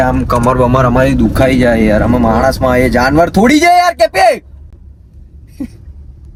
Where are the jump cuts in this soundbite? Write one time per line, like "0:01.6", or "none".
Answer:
none